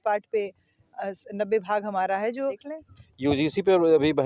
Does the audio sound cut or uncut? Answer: cut